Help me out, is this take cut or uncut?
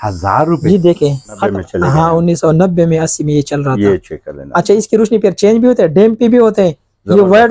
cut